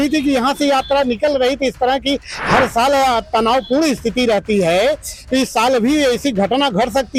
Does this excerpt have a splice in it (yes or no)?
no